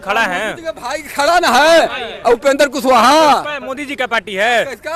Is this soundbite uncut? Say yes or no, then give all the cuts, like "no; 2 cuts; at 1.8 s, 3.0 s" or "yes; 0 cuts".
yes; 0 cuts